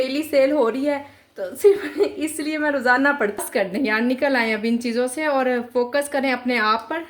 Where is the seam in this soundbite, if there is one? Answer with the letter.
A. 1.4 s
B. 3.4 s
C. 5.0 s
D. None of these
B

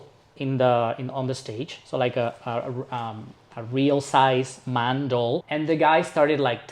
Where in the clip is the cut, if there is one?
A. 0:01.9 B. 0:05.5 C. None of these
B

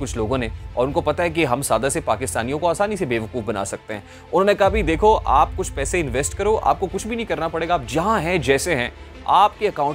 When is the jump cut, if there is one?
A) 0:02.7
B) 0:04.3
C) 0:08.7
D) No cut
D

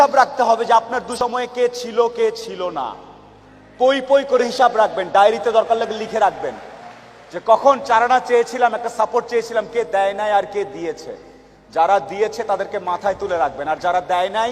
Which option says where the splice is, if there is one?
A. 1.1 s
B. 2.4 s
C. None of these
A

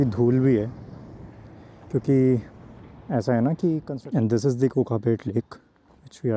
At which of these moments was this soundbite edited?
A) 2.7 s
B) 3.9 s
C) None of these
B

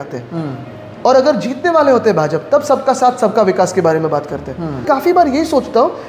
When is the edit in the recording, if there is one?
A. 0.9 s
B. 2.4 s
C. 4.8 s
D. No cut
C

